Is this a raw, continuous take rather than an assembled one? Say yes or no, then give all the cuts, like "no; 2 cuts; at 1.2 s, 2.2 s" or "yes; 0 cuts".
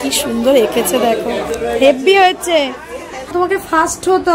no; 1 cut; at 3.3 s